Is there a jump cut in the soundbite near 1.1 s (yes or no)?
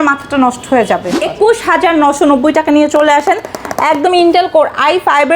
yes